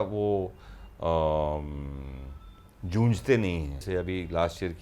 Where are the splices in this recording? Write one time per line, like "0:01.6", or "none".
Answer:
0:03.8